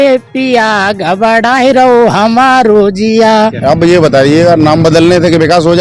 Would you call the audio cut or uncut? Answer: cut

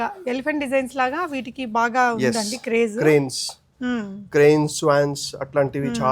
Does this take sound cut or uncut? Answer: uncut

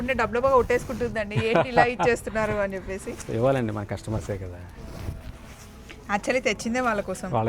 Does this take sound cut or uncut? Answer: uncut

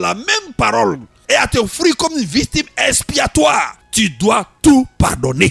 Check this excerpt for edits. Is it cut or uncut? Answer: cut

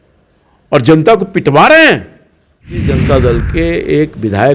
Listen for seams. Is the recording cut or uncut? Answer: cut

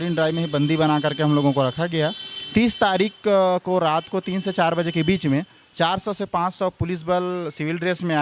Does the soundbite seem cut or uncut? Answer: uncut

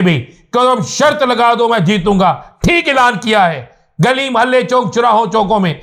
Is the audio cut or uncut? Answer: uncut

